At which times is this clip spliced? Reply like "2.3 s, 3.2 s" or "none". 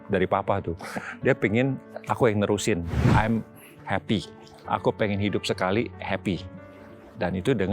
3.0 s